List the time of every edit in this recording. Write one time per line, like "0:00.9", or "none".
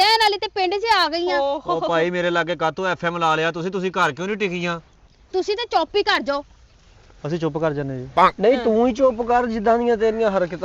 none

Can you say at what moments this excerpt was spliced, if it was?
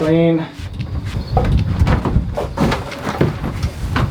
0:01.2

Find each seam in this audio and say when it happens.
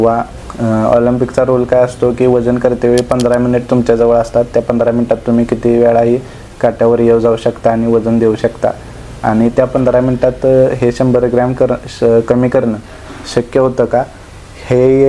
none

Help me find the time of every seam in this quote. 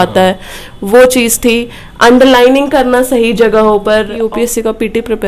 0:04.2

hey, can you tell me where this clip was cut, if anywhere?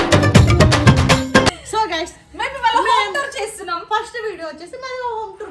none

